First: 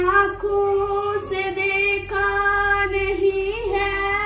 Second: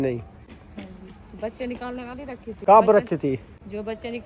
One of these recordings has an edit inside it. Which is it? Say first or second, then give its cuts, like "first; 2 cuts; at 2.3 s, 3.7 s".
second; 1 cut; at 2.6 s